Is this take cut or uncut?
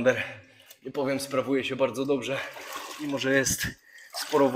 uncut